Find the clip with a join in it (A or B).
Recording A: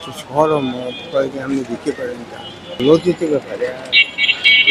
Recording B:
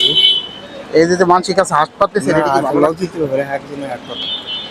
A